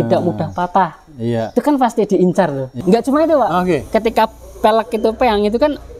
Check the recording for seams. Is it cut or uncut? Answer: cut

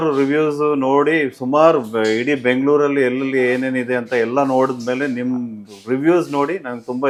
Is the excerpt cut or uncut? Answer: uncut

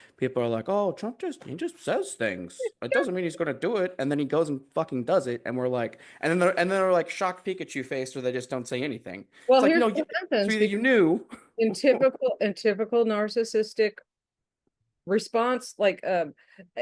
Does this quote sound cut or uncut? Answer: uncut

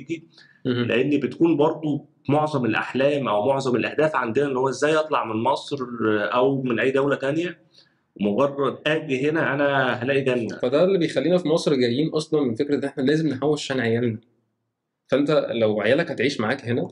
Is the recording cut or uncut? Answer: cut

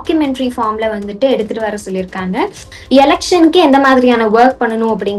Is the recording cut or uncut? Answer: cut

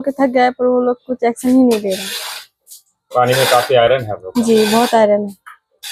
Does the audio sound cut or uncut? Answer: uncut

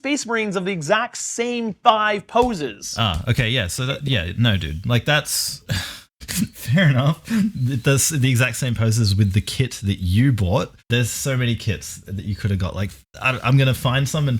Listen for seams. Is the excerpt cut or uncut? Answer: cut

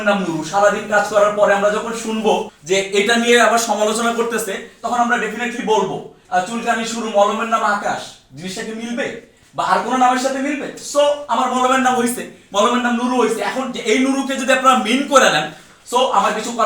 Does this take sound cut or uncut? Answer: cut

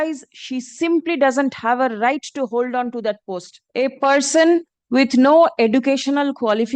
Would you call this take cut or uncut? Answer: cut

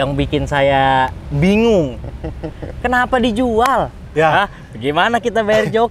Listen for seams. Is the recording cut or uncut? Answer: cut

